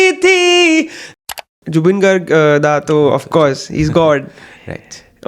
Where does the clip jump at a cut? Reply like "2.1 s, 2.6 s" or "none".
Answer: 1.3 s